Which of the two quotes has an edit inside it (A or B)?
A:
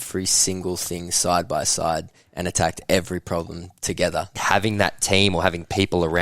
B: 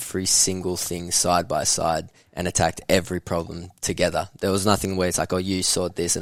A